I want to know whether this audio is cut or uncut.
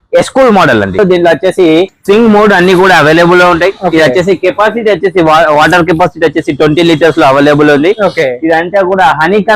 cut